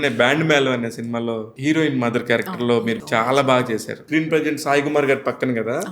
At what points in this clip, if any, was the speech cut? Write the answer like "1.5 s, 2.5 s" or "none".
1.5 s, 3.0 s, 4.0 s